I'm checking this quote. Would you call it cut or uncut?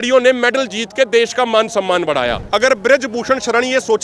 cut